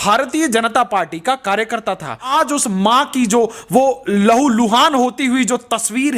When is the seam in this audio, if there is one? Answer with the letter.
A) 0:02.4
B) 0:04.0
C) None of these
A